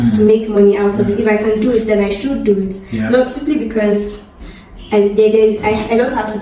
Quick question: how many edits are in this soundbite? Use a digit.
0